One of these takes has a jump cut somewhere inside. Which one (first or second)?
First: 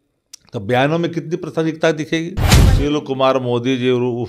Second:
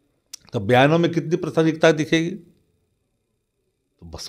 first